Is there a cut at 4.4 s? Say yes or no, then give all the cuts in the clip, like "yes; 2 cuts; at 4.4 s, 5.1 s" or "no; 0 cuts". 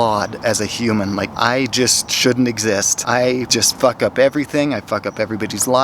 no; 2 cuts; at 1.3 s, 3.1 s